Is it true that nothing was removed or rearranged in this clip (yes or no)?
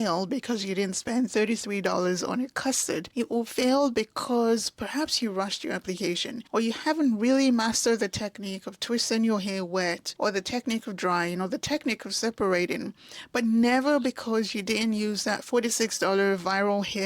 no